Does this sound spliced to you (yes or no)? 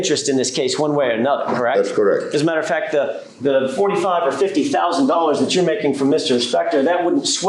no